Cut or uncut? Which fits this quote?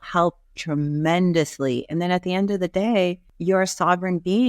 cut